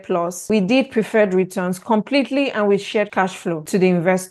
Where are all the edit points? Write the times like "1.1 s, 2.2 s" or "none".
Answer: none